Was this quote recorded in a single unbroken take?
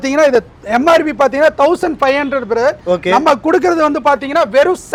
yes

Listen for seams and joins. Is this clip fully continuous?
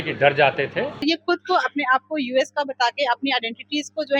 no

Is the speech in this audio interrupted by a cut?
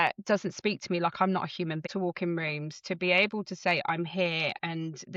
yes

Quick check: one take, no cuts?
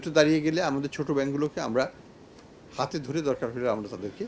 yes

